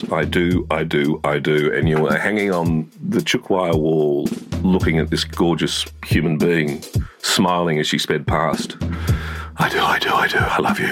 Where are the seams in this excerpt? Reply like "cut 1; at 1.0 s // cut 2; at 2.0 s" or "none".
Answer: none